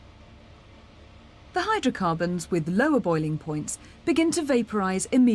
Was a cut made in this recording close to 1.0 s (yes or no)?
yes